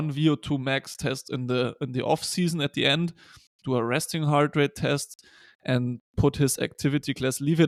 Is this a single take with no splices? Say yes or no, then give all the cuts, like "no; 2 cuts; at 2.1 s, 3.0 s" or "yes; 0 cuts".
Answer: yes; 0 cuts